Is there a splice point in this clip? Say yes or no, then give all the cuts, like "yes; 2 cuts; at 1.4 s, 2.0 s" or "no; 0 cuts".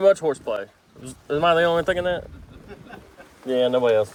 no; 0 cuts